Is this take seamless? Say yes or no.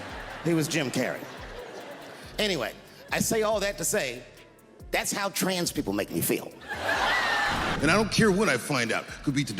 no